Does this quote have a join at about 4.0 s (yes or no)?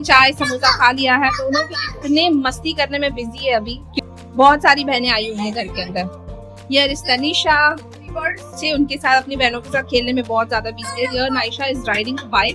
yes